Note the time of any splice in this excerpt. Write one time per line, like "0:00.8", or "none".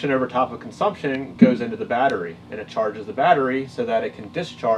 0:01.3